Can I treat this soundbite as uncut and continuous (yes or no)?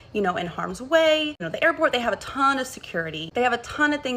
yes